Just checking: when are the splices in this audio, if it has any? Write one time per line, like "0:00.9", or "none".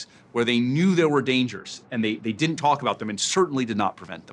none